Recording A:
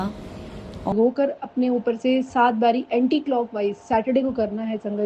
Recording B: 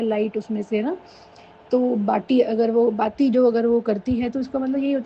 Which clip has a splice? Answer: A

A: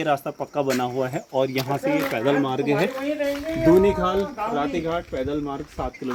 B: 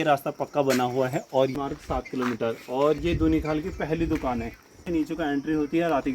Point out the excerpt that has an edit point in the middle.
B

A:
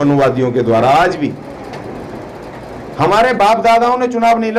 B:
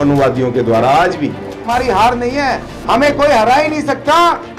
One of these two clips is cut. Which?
B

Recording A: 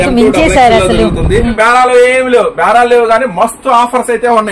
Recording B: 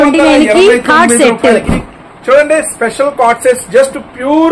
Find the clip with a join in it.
A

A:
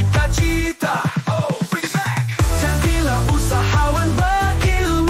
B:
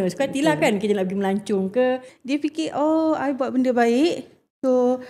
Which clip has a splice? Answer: B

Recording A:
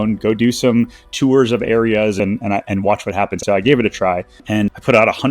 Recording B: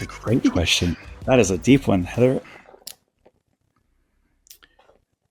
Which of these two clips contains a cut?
A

